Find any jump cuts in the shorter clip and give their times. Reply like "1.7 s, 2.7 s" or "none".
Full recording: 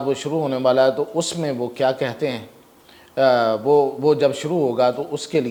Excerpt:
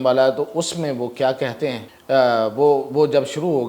1.9 s